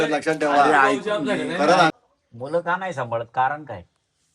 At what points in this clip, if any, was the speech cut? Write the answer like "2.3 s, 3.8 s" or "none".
1.9 s